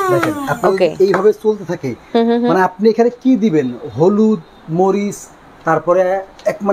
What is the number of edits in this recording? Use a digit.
0